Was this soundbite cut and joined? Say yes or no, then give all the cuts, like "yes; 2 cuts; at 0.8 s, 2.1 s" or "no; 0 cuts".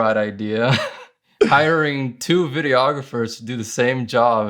no; 0 cuts